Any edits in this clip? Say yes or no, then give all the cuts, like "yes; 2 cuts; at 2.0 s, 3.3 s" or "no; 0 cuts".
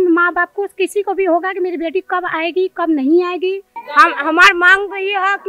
yes; 1 cut; at 3.8 s